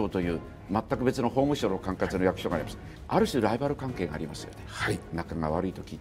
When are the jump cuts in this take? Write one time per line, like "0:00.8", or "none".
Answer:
none